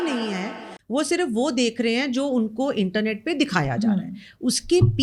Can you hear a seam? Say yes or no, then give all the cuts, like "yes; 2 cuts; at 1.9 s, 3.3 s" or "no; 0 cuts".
no; 0 cuts